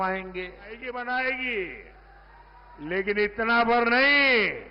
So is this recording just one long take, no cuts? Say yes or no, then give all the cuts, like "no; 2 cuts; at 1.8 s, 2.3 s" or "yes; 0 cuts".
no; 1 cut; at 0.9 s